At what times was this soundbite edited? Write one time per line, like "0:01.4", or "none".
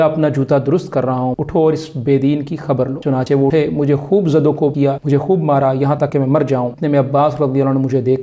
0:01.3
0:03.3
0:04.8
0:06.3